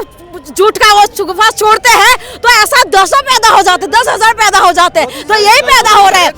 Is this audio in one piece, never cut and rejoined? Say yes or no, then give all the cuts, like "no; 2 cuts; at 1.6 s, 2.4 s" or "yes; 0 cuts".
yes; 0 cuts